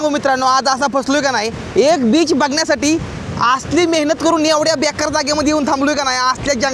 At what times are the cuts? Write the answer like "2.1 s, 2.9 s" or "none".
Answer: none